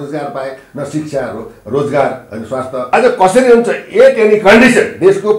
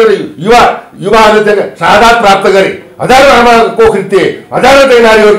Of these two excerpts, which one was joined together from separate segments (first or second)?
first